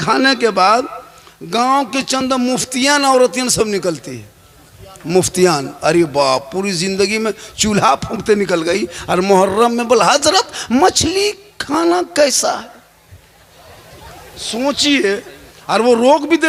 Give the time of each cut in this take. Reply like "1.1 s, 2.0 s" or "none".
none